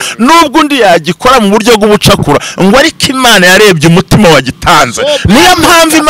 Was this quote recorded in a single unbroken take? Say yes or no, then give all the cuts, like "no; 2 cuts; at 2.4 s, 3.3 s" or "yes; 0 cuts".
yes; 0 cuts